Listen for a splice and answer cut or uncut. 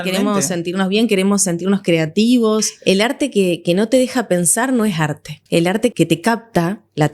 cut